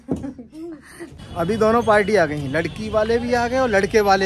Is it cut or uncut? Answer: cut